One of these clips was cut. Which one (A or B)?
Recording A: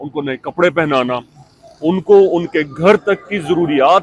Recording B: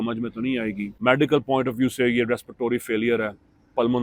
B